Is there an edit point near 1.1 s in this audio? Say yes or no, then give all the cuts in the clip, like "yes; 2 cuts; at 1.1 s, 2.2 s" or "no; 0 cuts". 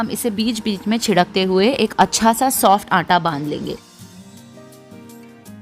no; 1 cut; at 4.5 s